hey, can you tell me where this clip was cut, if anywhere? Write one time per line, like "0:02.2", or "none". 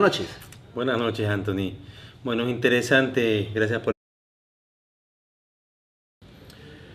none